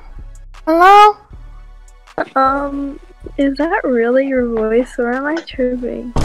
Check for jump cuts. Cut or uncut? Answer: uncut